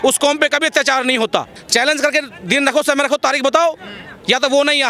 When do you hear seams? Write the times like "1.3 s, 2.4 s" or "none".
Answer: 1.6 s